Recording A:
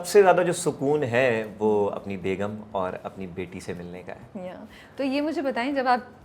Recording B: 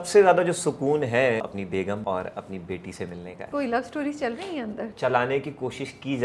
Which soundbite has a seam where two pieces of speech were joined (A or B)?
B